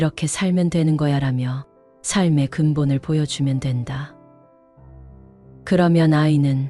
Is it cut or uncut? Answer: uncut